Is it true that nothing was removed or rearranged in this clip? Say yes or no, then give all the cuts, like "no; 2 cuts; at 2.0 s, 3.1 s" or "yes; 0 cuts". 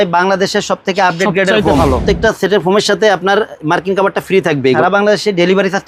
no; 2 cuts; at 1.9 s, 4.8 s